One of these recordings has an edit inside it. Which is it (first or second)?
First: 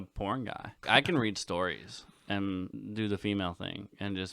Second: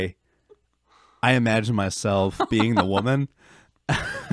first